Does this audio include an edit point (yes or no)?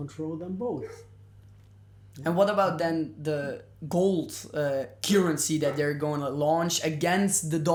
no